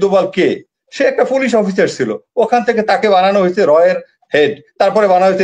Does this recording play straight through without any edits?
yes; 0 cuts

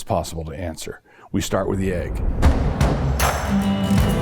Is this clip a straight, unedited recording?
no; 1 cut; at 2.2 s

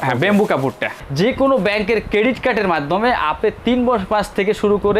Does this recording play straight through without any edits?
no; 1 cut; at 1.0 s

